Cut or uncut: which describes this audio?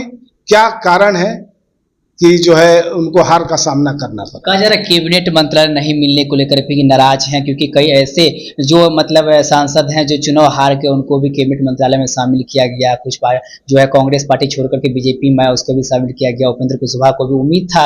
uncut